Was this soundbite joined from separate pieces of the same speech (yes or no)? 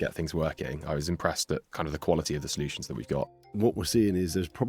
yes